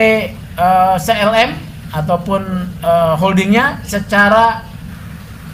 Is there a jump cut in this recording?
no; 0 cuts

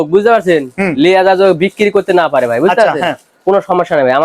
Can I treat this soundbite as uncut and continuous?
yes; 0 cuts

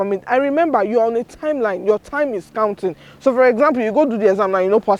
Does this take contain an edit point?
no; 0 cuts

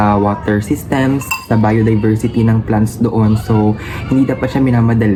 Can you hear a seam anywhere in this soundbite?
no; 0 cuts

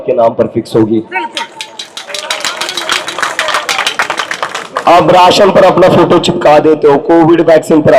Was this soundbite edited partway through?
no; 0 cuts

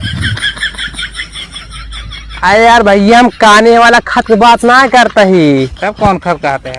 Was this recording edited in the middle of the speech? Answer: yes; 1 cut; at 2.3 s

